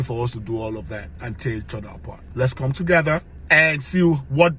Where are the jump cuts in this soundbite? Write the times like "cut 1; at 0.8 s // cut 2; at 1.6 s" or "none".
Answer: cut 1; at 1.1 s // cut 2; at 2.2 s